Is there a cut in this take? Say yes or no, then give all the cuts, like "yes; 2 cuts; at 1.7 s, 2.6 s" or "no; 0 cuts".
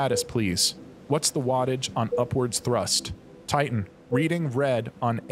yes; 1 cut; at 3.5 s